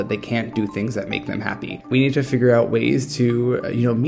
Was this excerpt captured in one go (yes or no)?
no